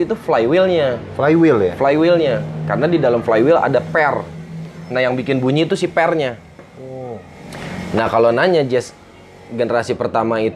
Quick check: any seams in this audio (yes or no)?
no